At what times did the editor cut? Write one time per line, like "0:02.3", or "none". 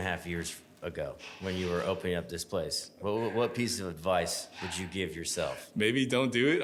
none